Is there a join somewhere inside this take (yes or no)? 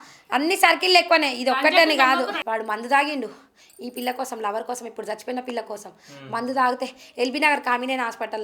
yes